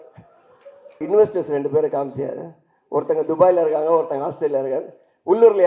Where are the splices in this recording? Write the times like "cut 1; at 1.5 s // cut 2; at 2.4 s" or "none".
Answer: cut 1; at 1.0 s